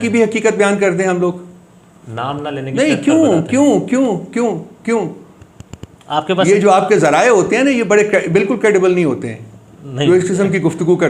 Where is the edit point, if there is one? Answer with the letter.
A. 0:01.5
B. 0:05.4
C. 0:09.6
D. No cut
D